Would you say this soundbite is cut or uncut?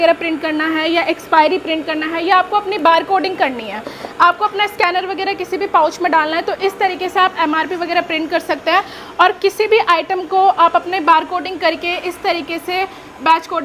uncut